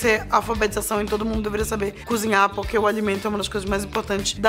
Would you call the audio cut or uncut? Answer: uncut